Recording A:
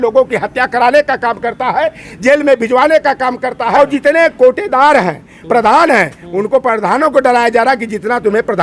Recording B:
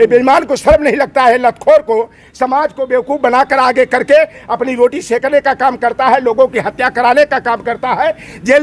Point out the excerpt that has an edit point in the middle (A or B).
A